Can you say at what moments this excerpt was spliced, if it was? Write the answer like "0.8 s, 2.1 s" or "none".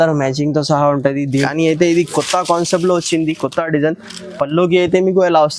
1.5 s

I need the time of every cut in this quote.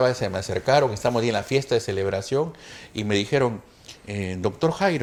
none

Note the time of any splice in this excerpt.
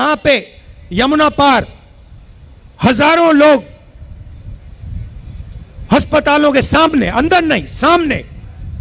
none

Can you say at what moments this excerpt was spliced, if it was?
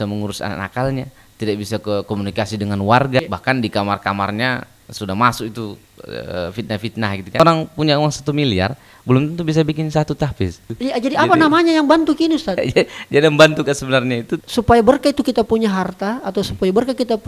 3.2 s, 7.4 s, 10.6 s, 14.3 s

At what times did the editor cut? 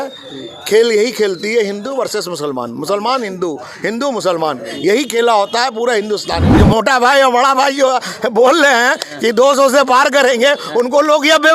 6.5 s

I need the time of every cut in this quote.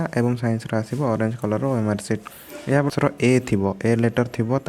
2.9 s

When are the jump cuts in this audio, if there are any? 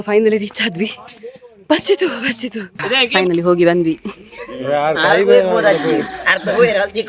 3.1 s

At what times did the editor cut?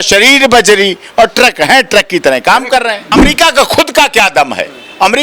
3.1 s

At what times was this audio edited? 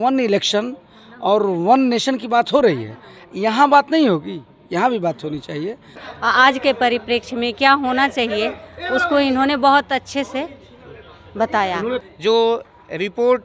6.0 s, 12.1 s

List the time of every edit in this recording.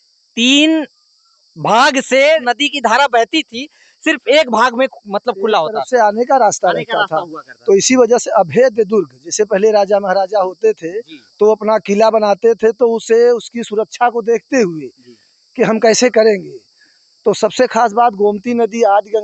2.4 s

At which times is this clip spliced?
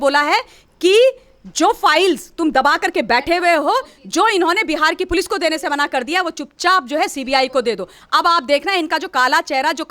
none

